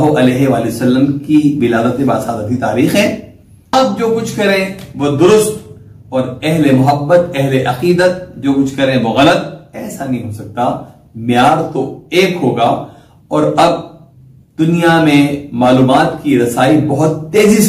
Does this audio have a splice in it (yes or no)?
yes